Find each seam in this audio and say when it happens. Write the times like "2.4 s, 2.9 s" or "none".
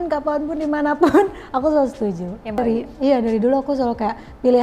2.6 s